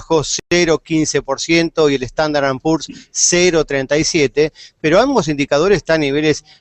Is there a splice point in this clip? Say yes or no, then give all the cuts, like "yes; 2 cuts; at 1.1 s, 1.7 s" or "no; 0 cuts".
no; 0 cuts